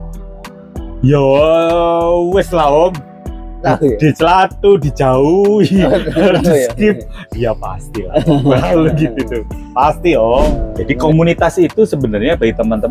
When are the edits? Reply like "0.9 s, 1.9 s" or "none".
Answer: 10.7 s